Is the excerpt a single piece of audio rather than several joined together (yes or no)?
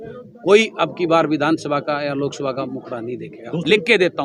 no